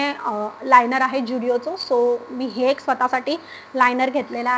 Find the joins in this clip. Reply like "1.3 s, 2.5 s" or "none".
none

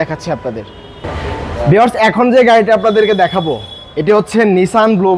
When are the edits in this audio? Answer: 1.0 s

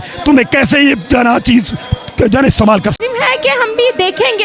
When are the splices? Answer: 3.0 s

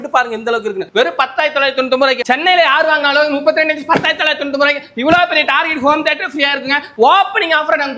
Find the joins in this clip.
2.2 s, 6.9 s

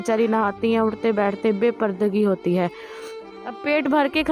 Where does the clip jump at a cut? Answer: 2.9 s

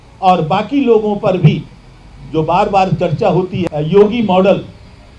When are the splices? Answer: 3.6 s

